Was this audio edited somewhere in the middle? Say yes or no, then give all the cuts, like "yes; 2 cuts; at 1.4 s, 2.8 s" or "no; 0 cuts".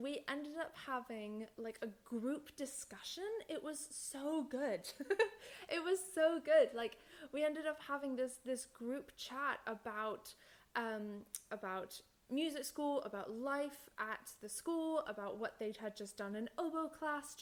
no; 0 cuts